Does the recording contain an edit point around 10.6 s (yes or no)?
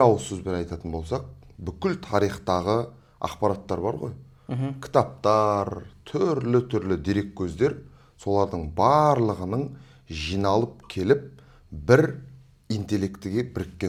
no